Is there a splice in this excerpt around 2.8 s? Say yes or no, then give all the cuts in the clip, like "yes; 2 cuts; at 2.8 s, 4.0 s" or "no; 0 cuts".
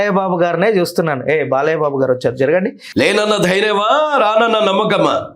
yes; 1 cut; at 2.8 s